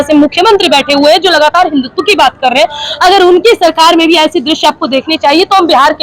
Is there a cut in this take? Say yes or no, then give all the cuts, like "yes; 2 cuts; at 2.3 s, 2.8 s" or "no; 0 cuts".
no; 0 cuts